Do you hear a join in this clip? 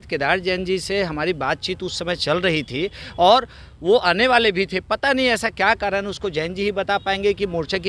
no; 0 cuts

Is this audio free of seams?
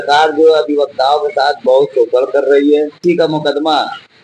no; 1 cut; at 3.0 s

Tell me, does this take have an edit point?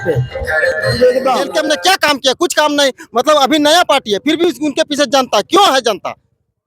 yes; 1 cut; at 1.5 s

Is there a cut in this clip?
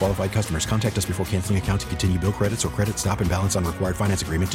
no; 0 cuts

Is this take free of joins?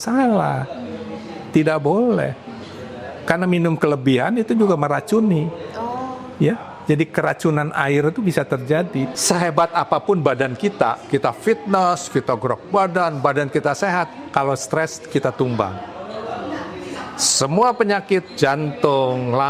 no; 1 cut; at 9.2 s

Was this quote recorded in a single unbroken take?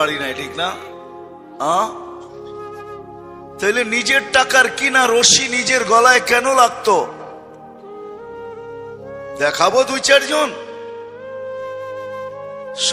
yes; 0 cuts

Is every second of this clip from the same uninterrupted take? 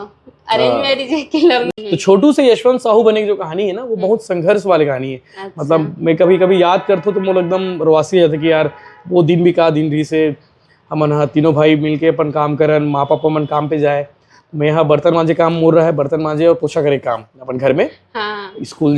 no; 1 cut; at 1.7 s

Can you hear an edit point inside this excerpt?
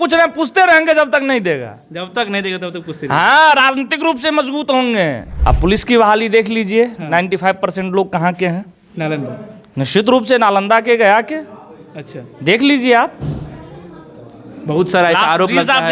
yes; 1 cut; at 5.3 s

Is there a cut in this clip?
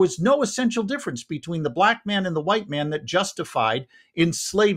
no; 0 cuts

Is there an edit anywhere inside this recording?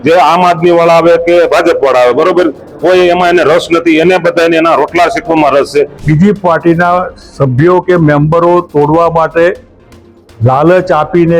yes; 1 cut; at 6.0 s

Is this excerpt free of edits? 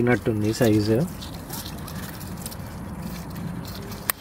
yes; 0 cuts

